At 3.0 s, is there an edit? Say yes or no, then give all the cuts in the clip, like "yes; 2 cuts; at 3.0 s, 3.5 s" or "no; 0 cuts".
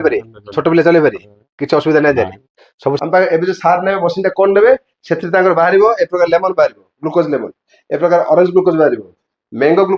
yes; 1 cut; at 3.0 s